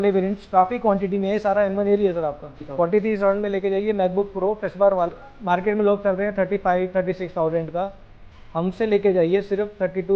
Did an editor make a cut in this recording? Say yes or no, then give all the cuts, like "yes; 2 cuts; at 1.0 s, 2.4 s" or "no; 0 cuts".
yes; 2 cuts; at 2.6 s, 5.1 s